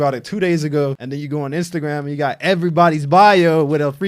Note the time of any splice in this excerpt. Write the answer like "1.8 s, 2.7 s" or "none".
1.0 s